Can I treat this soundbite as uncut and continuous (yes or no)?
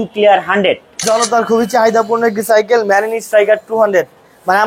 no